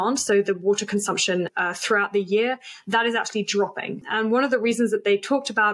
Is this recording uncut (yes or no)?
no